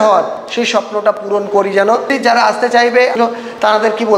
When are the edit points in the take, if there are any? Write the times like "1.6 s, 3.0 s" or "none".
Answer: 2.1 s, 3.1 s